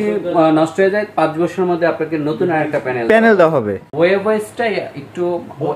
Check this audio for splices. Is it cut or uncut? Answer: cut